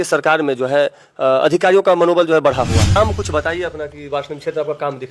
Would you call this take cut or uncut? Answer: cut